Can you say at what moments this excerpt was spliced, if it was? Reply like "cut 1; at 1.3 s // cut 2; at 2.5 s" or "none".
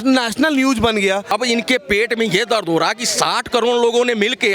cut 1; at 1.3 s